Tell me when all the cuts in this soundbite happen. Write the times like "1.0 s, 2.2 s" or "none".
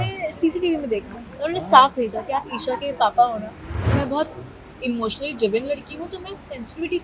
3.8 s